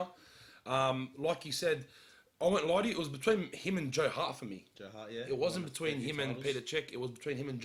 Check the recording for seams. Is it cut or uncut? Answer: uncut